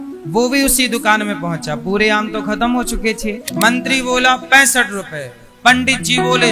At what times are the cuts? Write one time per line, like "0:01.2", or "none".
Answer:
0:03.5